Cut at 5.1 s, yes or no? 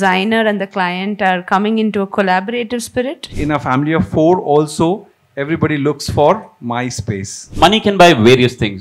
no